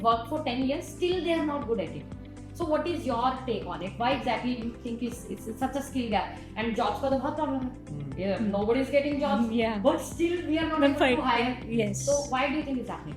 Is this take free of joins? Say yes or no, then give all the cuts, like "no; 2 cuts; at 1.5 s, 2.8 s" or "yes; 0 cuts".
yes; 0 cuts